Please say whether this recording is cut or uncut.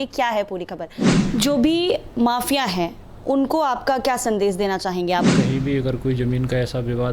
cut